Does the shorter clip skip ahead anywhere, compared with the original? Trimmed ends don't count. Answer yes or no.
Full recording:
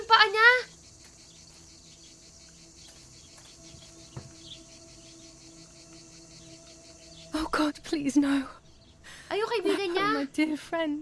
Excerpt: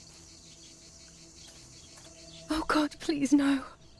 yes